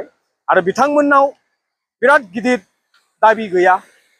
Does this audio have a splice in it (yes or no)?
no